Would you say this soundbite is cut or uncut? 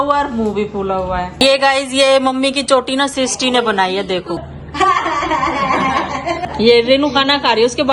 cut